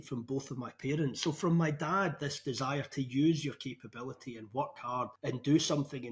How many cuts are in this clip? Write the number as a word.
zero